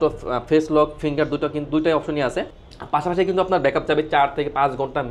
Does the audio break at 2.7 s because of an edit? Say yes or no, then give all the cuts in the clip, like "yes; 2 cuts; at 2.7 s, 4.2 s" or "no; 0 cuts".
no; 0 cuts